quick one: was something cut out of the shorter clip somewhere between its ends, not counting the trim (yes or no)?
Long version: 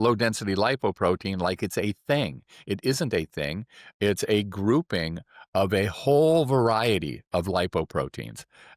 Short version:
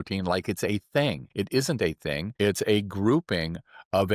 yes